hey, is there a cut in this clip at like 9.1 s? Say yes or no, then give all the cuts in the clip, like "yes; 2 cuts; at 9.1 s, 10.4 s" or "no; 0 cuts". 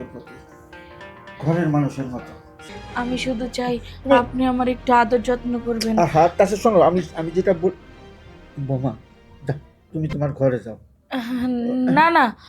no; 1 cut; at 2.7 s